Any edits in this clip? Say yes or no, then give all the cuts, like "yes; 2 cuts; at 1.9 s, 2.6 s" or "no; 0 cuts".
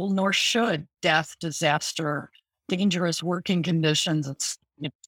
no; 0 cuts